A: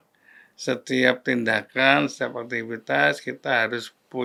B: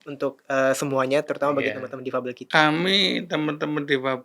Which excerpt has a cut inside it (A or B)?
B